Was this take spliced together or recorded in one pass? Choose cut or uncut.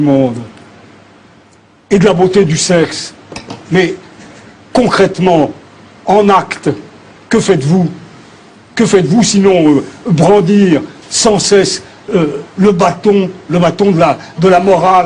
uncut